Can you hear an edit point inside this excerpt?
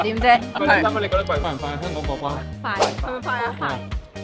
yes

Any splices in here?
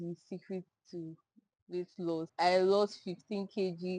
yes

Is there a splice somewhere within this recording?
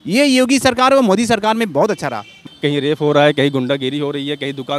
yes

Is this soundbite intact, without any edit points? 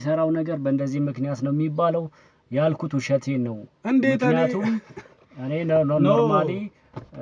yes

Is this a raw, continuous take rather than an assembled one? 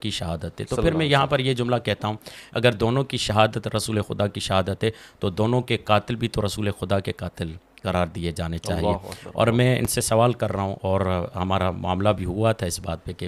yes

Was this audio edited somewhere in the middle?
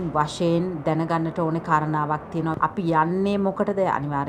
yes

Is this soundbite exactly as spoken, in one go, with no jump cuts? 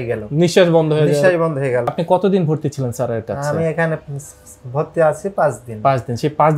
no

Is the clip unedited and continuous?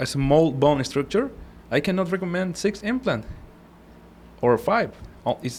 yes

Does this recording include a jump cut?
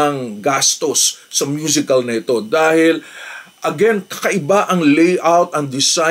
no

